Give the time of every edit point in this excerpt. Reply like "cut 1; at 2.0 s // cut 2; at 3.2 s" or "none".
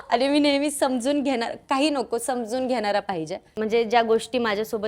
cut 1; at 3.4 s